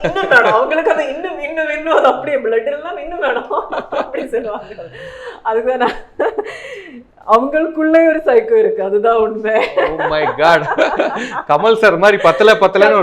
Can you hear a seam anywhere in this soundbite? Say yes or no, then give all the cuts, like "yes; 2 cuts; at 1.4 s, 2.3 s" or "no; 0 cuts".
no; 0 cuts